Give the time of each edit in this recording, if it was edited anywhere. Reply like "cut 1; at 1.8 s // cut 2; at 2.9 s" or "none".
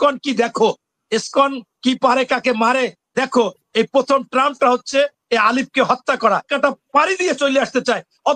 cut 1; at 6.5 s